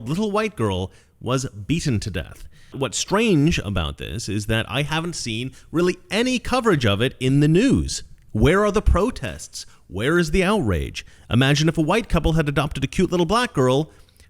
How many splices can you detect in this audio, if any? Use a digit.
1